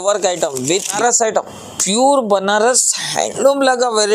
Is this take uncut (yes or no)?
no